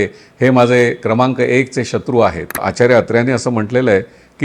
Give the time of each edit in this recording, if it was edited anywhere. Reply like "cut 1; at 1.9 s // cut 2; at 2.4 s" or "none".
cut 1; at 2.6 s